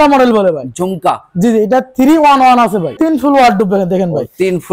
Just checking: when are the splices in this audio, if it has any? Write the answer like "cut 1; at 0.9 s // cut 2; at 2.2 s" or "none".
cut 1; at 2.9 s